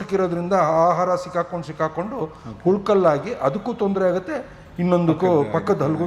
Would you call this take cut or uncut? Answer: uncut